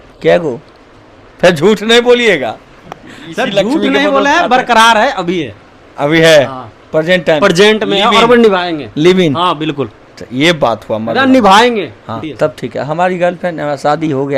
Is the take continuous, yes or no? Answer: no